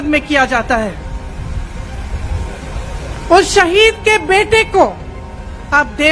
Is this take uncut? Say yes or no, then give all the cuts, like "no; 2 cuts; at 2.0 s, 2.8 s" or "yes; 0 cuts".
yes; 0 cuts